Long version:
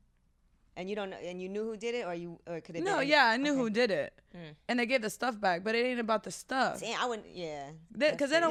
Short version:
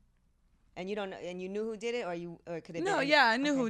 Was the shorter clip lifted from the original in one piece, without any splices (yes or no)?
yes